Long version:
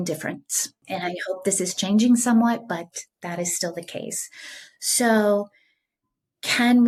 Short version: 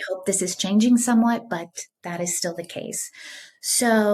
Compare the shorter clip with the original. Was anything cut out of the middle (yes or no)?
no